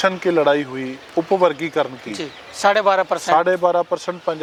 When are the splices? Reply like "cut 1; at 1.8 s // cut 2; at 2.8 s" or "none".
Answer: none